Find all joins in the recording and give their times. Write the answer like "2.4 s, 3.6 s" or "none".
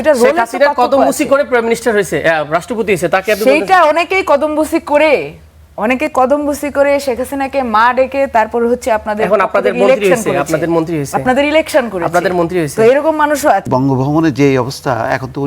13.6 s